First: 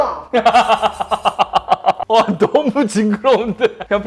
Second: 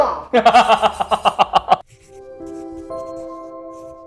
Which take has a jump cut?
second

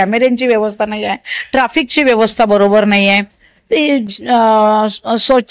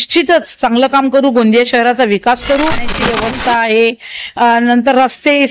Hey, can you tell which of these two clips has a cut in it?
second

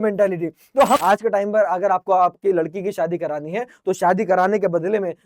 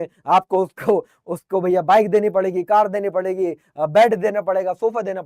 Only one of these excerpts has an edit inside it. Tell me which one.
first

